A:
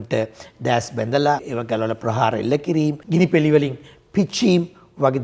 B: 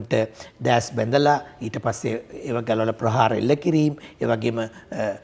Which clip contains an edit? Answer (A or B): A